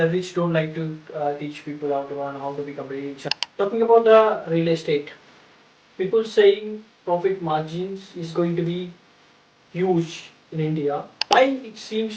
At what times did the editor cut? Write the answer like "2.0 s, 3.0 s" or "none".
3.2 s, 11.3 s